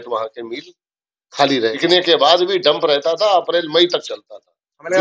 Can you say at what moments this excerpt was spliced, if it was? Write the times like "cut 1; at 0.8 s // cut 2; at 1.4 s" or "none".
cut 1; at 1.7 s